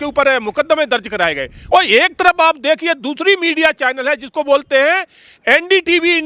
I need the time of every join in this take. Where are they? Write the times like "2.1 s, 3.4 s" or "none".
1.5 s